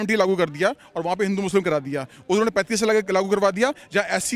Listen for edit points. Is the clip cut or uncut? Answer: uncut